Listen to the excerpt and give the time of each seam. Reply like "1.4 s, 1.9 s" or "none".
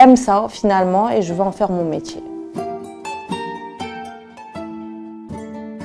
2.2 s

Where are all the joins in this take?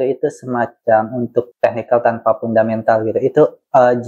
1.5 s

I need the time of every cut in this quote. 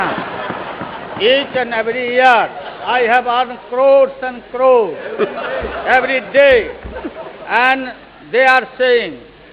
none

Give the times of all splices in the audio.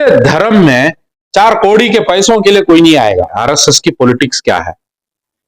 3.4 s

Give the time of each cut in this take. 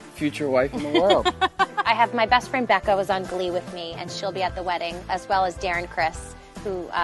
2.5 s

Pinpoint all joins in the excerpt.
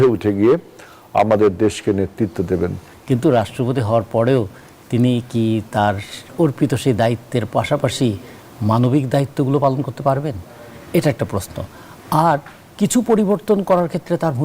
2.9 s

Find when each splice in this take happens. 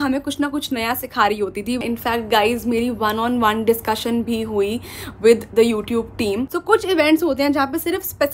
1.8 s, 6.5 s

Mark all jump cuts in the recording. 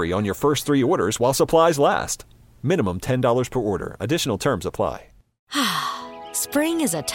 5.4 s

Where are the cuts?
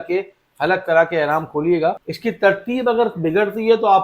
2.1 s

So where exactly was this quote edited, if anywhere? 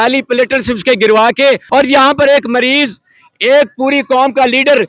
1.6 s

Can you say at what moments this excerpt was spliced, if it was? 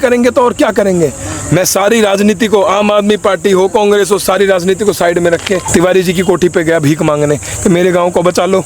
5.6 s

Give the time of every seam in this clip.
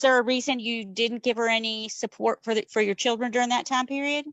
none

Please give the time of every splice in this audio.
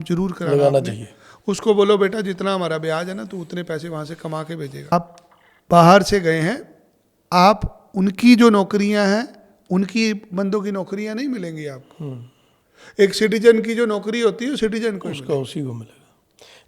4.9 s

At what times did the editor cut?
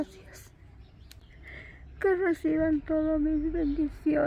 1.2 s

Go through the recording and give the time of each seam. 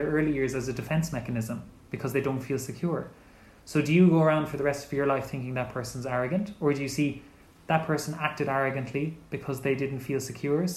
none

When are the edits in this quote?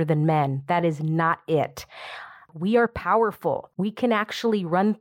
2.5 s, 3.7 s

